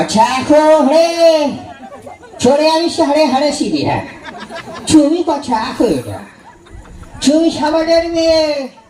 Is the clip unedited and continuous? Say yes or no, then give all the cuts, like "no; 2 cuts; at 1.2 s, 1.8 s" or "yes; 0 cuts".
yes; 0 cuts